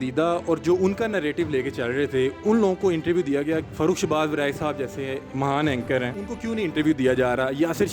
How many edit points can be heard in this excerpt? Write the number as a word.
three